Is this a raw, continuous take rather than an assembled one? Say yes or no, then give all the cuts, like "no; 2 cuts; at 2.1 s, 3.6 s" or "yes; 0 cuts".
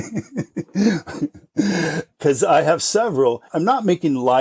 no; 2 cuts; at 2.2 s, 3.5 s